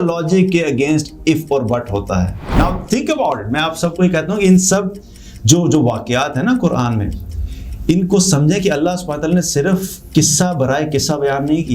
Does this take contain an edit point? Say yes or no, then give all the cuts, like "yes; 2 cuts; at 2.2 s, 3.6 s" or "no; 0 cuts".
yes; 1 cut; at 2.5 s